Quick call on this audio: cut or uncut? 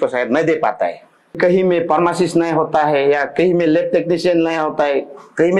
cut